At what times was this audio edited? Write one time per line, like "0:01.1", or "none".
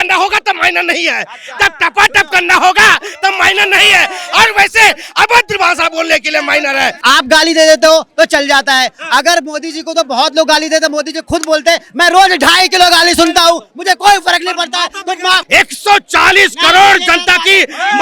0:07.0
0:15.4